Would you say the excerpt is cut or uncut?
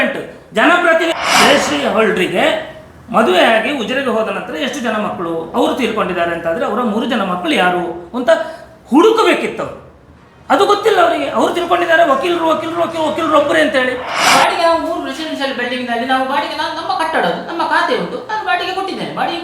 cut